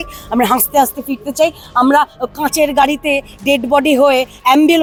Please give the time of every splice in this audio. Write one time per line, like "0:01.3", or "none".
none